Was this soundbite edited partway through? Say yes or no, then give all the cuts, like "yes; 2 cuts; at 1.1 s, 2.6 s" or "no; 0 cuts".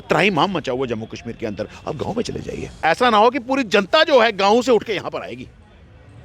yes; 1 cut; at 2.7 s